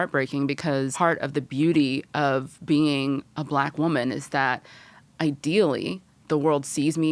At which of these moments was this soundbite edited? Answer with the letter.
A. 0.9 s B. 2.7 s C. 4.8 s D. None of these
A